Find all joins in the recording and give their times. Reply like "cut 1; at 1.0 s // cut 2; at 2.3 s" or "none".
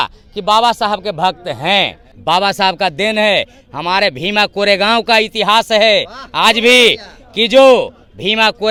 none